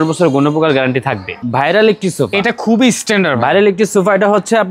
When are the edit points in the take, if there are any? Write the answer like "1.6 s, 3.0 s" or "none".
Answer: 1.3 s